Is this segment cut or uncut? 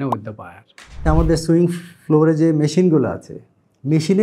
cut